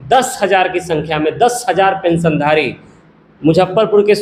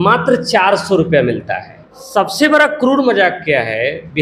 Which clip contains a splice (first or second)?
second